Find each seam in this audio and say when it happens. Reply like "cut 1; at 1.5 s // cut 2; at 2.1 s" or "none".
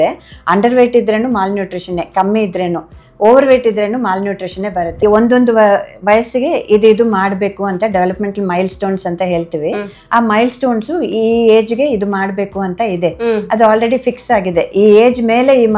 cut 1; at 5.0 s